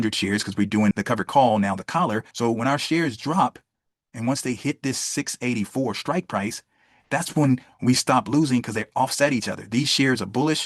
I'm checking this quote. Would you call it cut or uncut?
cut